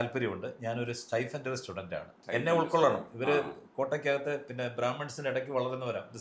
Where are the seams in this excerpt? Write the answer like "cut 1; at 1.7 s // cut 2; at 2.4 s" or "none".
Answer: cut 1; at 2.2 s